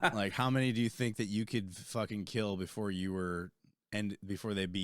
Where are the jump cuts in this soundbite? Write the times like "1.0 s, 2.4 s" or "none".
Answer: none